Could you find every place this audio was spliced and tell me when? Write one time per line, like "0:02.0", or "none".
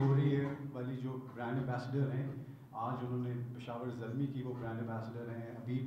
none